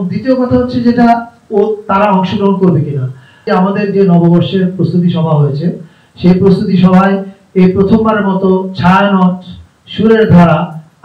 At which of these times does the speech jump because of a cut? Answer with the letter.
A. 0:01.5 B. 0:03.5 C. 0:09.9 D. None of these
B